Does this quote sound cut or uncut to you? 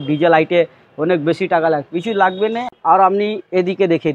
cut